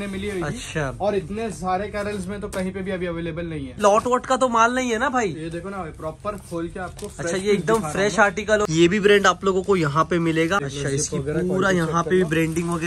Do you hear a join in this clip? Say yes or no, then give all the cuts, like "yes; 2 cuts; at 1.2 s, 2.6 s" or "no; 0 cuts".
yes; 3 cuts; at 3.8 s, 8.7 s, 10.6 s